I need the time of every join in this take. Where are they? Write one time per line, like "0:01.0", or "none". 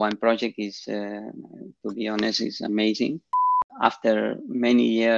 0:03.6

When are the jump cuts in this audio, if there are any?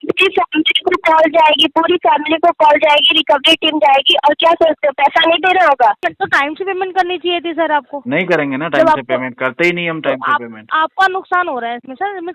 0:06.0

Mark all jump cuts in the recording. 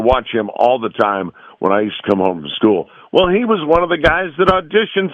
none

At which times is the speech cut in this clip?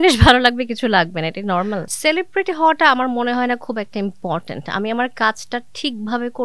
0:01.9

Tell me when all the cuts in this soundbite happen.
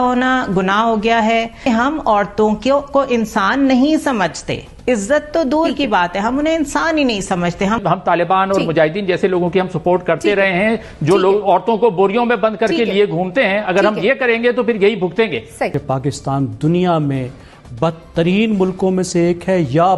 0:01.6
0:07.8
0:15.8

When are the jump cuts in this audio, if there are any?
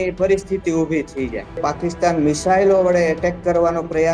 0:01.6

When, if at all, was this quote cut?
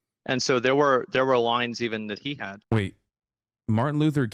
0:02.6

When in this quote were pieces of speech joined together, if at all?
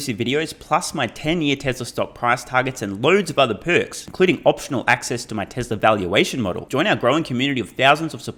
none

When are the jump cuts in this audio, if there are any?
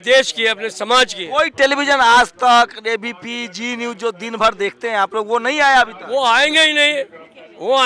none

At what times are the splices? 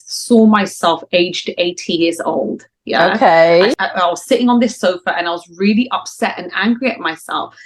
0:03.8

